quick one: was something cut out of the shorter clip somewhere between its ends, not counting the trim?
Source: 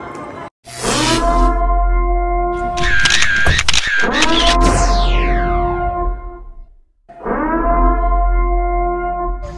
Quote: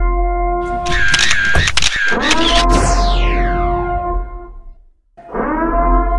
no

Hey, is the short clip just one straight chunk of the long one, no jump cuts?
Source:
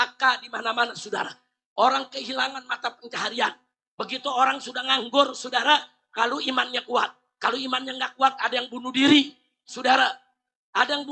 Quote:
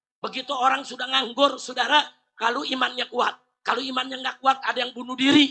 yes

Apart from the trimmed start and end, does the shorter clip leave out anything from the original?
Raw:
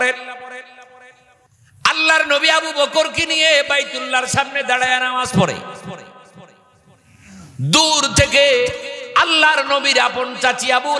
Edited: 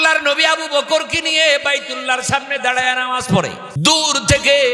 yes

